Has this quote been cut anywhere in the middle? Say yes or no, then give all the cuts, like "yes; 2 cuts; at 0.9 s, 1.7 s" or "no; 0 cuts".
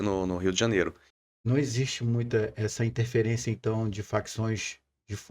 yes; 1 cut; at 1.0 s